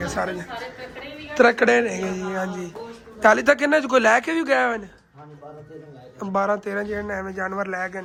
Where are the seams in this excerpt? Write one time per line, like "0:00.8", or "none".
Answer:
none